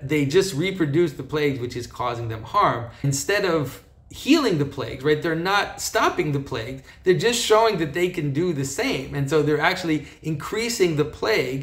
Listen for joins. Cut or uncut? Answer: cut